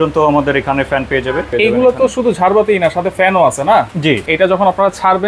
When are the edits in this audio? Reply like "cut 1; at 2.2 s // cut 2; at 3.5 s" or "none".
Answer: cut 1; at 1.5 s // cut 2; at 4.3 s